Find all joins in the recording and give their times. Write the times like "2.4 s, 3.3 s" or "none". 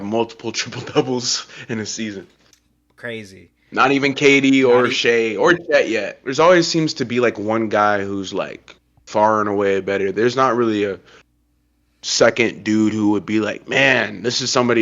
6.2 s